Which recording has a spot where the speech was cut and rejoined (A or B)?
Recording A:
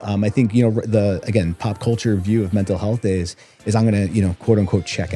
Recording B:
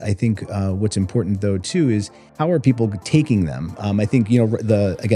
B